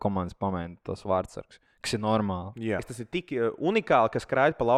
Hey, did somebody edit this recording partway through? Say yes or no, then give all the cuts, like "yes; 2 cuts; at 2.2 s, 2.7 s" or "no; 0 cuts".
yes; 1 cut; at 3.0 s